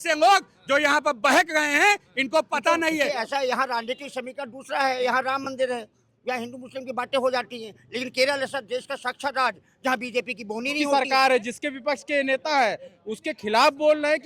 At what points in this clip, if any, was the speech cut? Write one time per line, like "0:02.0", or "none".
0:03.1
0:10.9

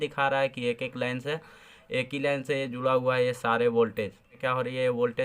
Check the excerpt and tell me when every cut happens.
0:04.4

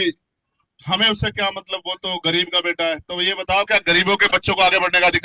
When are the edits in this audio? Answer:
none

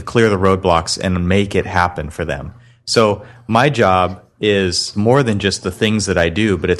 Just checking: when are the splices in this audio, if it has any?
0:04.9

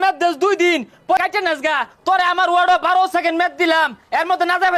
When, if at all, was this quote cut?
0:01.2

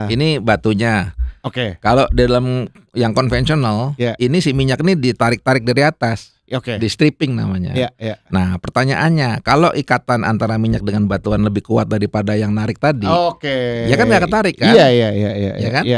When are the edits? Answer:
none

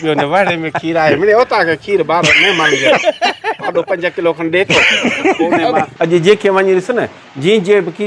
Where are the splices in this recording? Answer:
0:05.9

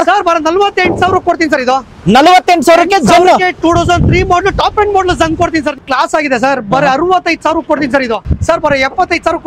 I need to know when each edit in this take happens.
0:05.7
0:08.2

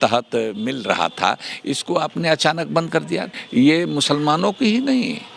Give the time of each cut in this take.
0:03.3

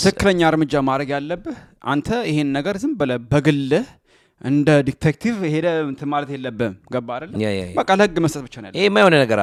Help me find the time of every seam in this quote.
none

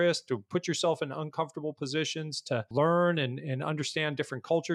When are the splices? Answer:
0:02.7

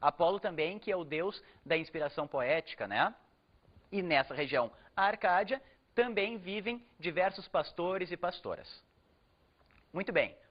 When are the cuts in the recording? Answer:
0:01.6

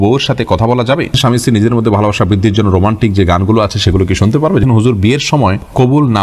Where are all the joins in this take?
0:01.1
0:04.6

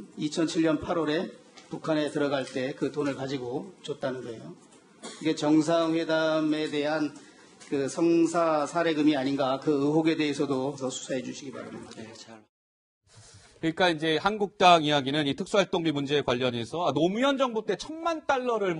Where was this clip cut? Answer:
0:11.0

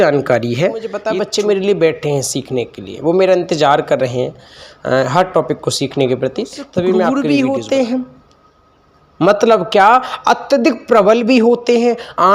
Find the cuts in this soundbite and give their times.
0:01.0
0:07.1

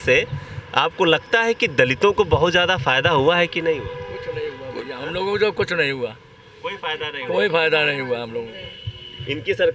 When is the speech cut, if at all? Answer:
none

